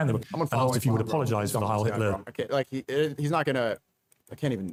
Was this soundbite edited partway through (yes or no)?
no